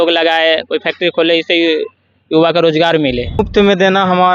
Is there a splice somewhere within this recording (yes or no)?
yes